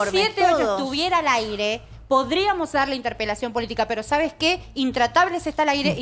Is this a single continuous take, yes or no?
yes